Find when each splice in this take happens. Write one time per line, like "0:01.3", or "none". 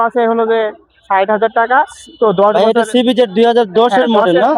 none